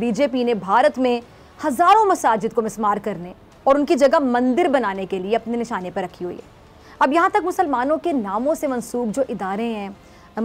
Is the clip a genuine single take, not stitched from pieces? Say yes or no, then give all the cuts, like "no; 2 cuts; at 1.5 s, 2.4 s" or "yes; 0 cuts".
yes; 0 cuts